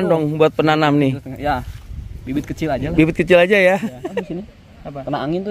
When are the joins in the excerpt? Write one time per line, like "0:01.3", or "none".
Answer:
0:04.2